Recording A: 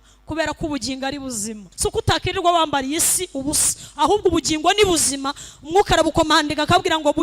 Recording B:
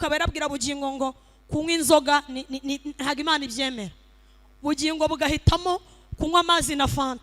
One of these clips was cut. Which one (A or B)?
A